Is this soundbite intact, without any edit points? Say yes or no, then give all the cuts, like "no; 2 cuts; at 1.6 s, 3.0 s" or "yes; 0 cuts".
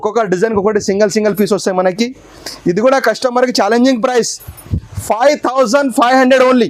yes; 0 cuts